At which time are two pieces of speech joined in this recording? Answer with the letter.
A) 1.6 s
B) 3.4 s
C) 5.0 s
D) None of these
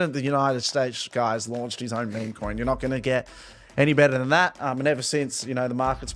D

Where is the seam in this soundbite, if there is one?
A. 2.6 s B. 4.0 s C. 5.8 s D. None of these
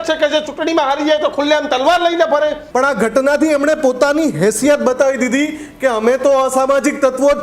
A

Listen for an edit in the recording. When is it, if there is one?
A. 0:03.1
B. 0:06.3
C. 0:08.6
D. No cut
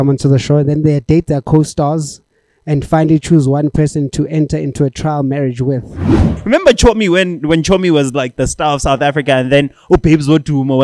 B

